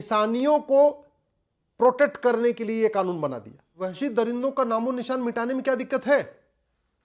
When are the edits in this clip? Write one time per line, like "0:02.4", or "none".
0:03.8